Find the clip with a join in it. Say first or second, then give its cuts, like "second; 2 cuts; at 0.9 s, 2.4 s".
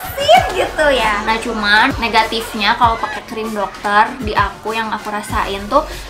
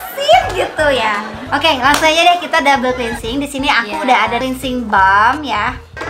first; 1 cut; at 1.6 s